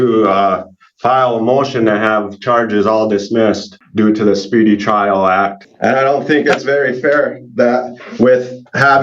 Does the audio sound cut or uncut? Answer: cut